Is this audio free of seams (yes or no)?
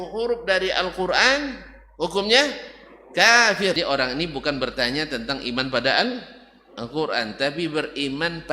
no